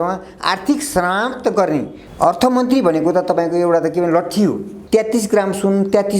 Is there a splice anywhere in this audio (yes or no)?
yes